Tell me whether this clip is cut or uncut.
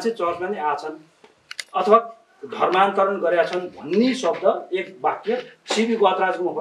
uncut